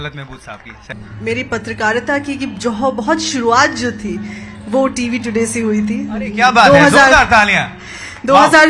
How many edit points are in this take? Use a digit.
1